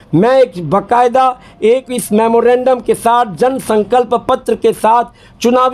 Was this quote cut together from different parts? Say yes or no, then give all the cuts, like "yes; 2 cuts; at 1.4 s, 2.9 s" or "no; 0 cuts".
no; 0 cuts